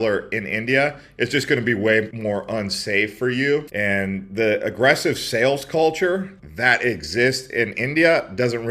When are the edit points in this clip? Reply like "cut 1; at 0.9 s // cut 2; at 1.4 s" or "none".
cut 1; at 3.7 s